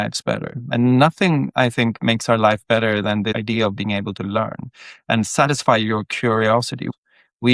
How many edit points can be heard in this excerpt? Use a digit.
1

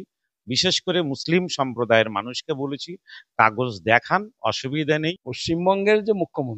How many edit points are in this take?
1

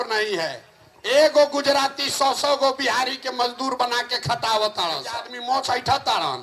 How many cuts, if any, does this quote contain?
1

